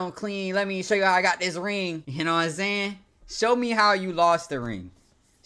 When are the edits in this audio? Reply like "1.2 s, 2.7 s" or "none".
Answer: 2.1 s